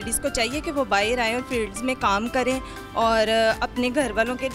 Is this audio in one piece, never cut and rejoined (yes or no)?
yes